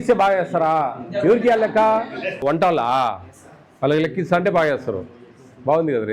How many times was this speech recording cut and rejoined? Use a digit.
1